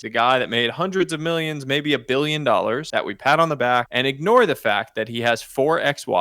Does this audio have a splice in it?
yes; 2 cuts; at 2.8 s, 3.9 s

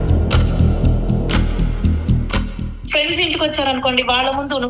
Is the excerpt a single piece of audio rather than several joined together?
no; 1 cut; at 2.8 s

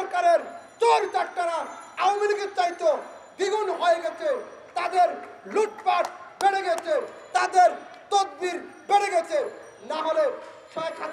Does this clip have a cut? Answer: no; 0 cuts

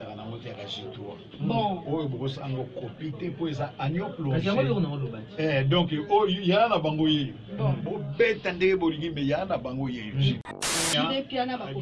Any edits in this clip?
yes; 1 cut; at 10.8 s

